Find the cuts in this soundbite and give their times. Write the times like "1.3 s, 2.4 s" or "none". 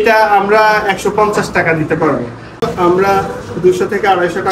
2.7 s